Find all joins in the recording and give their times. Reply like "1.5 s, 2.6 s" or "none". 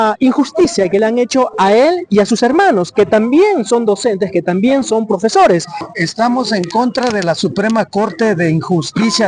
5.8 s